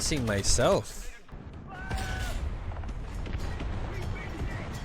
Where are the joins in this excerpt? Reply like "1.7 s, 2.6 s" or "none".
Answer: 1.3 s